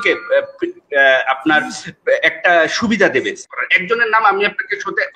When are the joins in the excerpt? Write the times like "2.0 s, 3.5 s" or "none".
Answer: 3.4 s